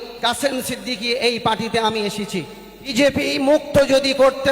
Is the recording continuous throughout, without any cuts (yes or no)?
no